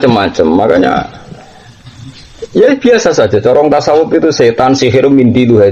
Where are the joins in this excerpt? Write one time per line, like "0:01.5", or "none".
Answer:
none

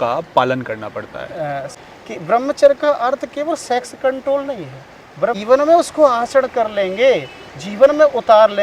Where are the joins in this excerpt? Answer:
0:01.7
0:05.4

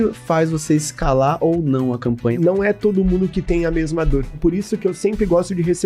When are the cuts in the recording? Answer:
0:02.4
0:04.4

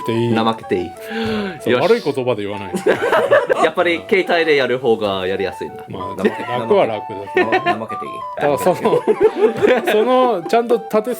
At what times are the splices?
0:01.0

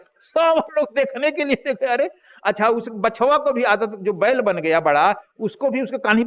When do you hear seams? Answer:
none

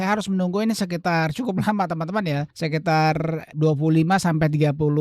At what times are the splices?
0:02.5
0:03.5

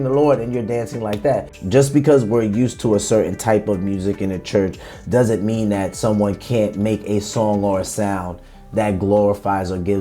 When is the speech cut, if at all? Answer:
0:01.5

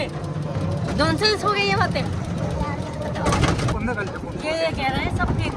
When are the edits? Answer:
none

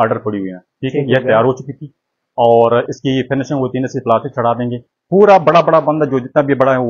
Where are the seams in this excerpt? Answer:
0:04.9

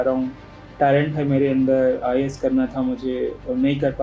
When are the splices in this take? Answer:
none

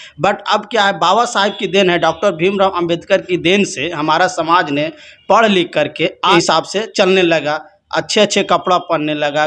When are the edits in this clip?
none

